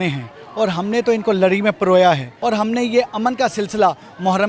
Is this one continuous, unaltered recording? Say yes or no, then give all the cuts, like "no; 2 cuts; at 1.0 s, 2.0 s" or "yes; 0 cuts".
no; 1 cut; at 2.3 s